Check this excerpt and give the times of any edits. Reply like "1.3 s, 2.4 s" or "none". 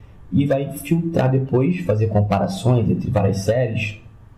0.9 s

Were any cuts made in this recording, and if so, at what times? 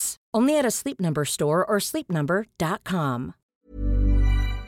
3.4 s

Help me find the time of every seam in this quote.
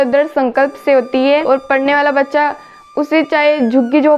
1.4 s

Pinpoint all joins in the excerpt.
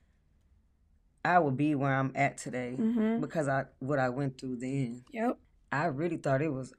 5.5 s

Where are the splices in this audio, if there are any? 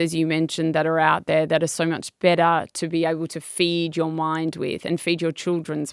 none

